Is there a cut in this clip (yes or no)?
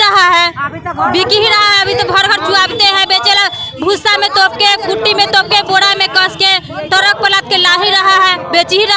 no